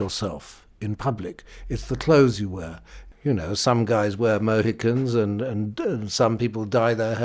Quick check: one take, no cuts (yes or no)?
no